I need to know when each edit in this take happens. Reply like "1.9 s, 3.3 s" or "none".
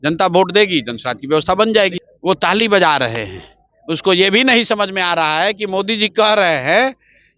2.1 s